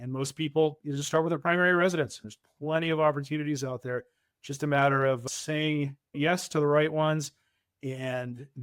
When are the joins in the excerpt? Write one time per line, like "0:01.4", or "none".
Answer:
0:02.2